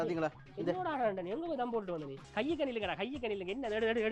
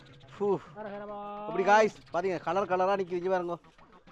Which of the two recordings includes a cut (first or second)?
first